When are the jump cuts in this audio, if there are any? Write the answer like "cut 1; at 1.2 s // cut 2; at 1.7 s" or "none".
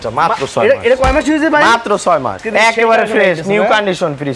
cut 1; at 2.4 s